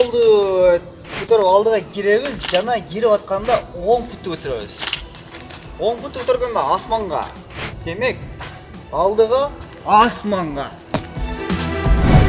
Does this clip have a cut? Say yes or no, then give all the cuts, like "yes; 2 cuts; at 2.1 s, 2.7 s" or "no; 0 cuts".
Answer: yes; 1 cut; at 11.3 s